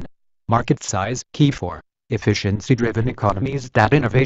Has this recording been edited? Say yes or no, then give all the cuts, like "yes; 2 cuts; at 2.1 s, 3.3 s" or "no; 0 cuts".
yes; 1 cut; at 1.3 s